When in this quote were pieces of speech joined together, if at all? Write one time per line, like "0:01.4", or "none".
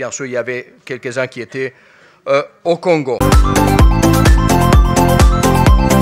0:03.2